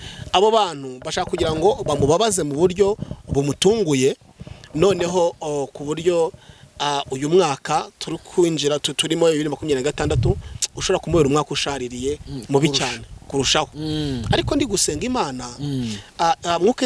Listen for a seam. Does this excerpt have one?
no; 0 cuts

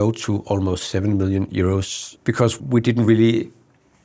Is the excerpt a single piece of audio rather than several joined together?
no; 1 cut; at 2.0 s

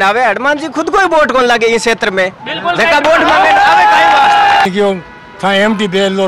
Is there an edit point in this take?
yes; 1 cut; at 4.7 s

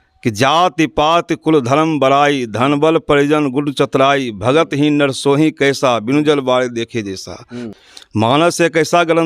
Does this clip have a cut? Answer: yes; 1 cut; at 7.7 s

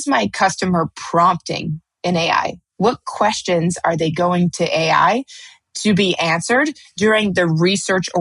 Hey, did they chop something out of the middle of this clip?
no; 0 cuts

